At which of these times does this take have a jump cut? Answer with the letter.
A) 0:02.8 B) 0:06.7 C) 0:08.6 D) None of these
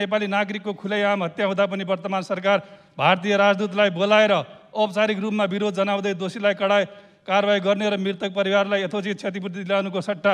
D